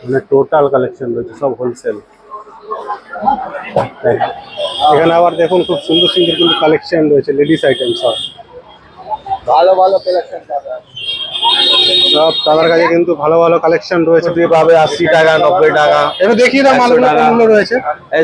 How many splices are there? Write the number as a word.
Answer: two